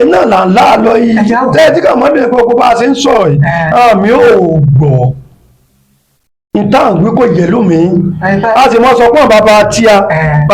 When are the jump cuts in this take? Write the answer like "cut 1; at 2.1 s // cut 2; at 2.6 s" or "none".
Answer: none